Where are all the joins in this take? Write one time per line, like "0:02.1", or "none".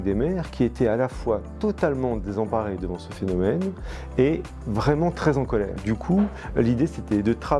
none